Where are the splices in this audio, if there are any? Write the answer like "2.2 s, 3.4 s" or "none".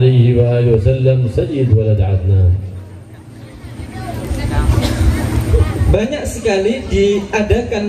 4.7 s